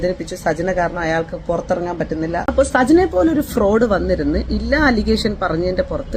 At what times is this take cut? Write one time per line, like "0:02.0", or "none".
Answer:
0:02.4